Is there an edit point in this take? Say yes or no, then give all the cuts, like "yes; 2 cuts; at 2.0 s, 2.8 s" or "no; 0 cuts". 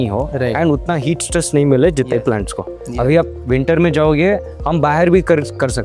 no; 0 cuts